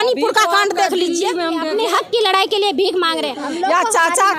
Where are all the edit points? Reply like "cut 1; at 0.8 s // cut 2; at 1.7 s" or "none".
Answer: cut 1; at 1.7 s // cut 2; at 3.4 s